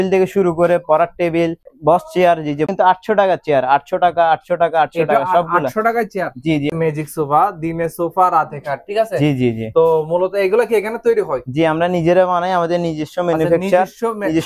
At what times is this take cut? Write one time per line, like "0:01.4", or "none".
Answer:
0:01.6
0:02.7
0:06.7